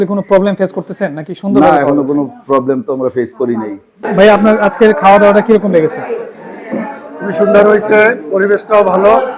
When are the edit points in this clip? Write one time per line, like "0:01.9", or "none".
0:04.1